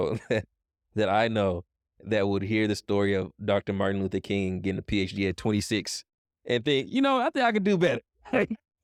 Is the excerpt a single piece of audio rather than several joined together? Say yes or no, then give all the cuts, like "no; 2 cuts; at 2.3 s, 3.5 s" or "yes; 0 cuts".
yes; 0 cuts